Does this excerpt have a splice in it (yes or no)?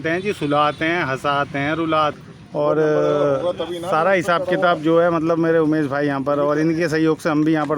yes